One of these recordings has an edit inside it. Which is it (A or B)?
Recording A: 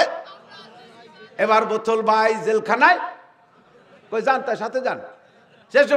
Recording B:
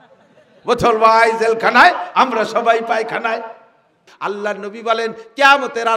B